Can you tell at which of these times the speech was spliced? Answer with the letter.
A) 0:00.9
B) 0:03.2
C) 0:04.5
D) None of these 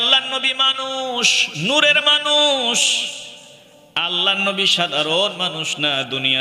D